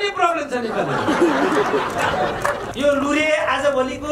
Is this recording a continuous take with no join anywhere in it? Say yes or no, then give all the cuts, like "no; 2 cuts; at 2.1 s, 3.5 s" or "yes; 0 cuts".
no; 1 cut; at 2.7 s